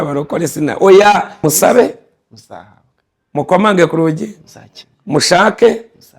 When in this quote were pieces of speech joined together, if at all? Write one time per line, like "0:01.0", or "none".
0:01.3